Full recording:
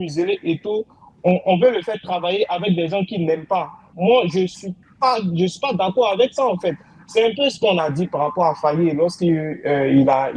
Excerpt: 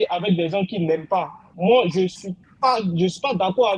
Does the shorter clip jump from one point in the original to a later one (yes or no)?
no